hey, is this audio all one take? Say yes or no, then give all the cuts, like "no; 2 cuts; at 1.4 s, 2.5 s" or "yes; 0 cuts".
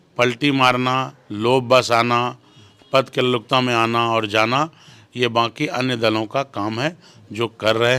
yes; 0 cuts